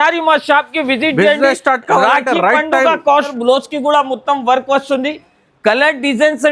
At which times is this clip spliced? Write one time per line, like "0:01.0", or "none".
0:03.3